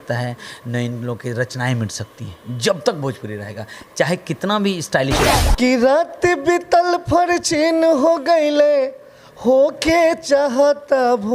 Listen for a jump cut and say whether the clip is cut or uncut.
cut